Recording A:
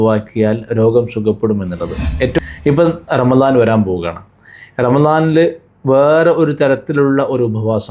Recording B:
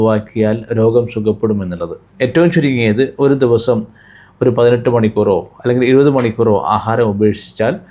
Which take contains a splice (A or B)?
A